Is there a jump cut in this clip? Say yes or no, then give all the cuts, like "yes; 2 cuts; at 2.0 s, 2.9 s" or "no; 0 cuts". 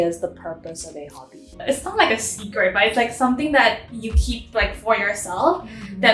yes; 1 cut; at 1.6 s